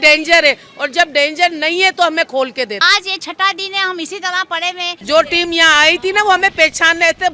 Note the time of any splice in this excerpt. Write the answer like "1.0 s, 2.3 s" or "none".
2.8 s, 5.0 s